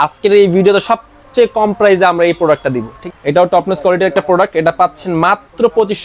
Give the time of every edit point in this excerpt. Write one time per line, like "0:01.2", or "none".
0:02.9